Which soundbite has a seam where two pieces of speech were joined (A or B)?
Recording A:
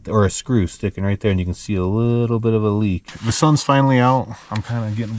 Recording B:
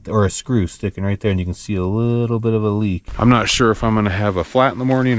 A